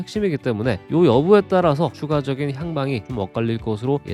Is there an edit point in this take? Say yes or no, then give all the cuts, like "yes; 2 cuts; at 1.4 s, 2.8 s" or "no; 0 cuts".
no; 0 cuts